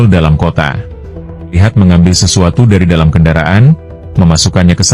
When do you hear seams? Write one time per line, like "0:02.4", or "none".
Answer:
0:01.6

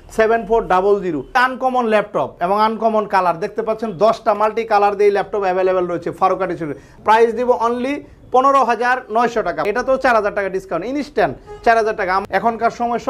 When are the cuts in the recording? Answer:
0:01.4
0:06.8
0:09.7
0:12.2

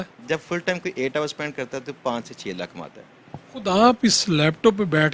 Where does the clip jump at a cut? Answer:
none

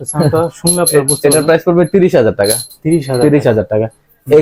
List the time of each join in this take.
none

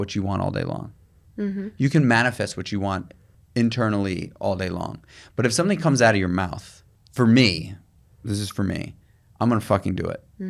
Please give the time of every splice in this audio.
none

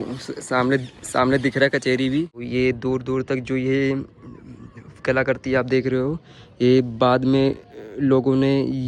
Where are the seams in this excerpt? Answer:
0:02.5

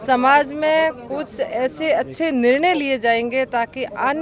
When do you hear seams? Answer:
none

